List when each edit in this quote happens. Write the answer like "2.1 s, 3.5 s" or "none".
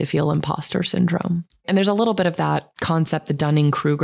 1.6 s, 2.7 s